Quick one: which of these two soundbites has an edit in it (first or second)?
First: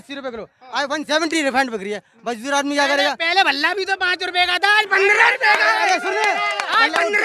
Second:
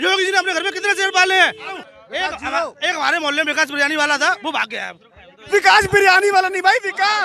second